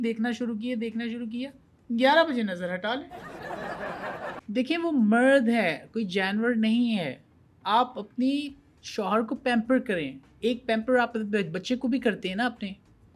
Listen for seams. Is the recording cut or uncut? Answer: cut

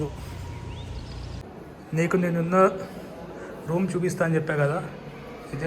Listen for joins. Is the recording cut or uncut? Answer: cut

